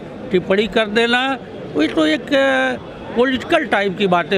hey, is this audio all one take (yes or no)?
yes